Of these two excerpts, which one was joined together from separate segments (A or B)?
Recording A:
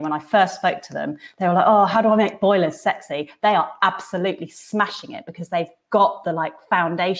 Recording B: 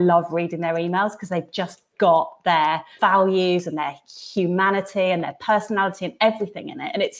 B